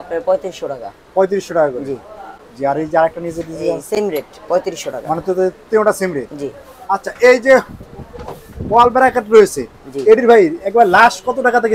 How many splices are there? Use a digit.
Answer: 0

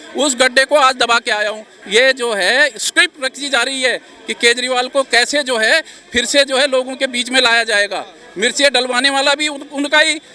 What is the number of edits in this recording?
1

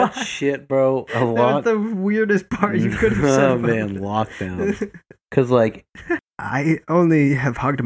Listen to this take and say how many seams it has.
1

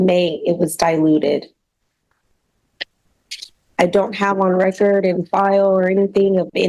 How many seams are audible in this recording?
0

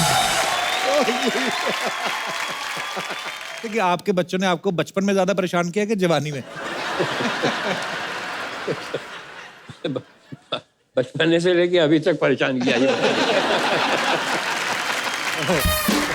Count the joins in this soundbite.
1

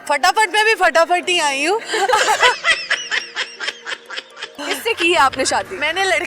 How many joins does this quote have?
2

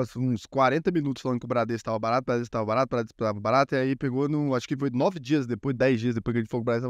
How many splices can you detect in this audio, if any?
0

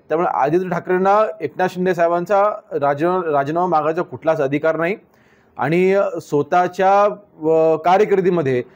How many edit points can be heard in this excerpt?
0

